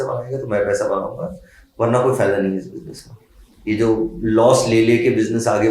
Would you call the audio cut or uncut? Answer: uncut